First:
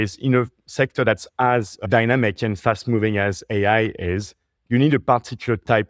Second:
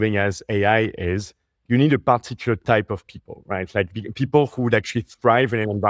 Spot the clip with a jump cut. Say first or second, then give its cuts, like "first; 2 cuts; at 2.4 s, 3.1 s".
first; 1 cut; at 1.8 s